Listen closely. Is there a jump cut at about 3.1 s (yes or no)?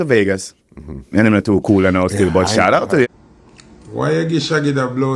yes